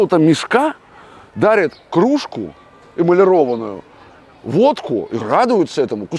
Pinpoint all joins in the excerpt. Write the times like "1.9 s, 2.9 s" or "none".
none